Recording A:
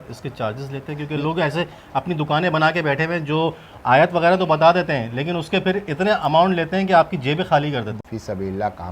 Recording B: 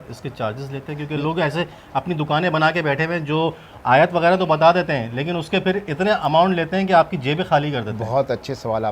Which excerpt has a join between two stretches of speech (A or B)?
A